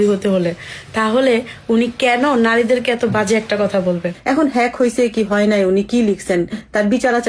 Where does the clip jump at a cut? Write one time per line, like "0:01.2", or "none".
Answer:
0:04.1